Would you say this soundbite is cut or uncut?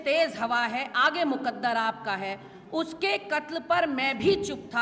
uncut